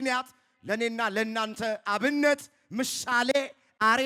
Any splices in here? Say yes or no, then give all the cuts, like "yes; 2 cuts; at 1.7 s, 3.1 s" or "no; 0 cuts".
no; 0 cuts